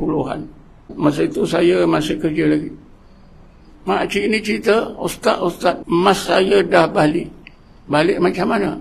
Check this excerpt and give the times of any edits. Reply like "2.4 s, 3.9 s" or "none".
0.9 s, 5.8 s